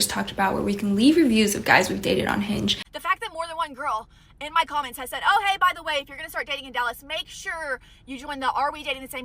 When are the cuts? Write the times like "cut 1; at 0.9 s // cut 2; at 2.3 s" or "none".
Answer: cut 1; at 2.9 s